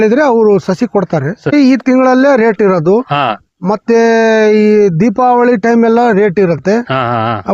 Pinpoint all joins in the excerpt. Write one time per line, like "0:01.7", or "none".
0:01.5